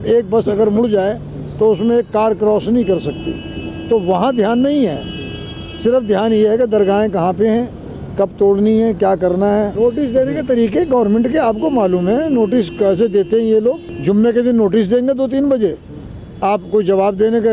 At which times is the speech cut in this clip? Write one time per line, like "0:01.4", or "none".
0:09.7
0:13.9